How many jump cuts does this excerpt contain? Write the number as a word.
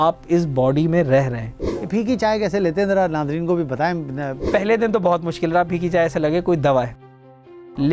two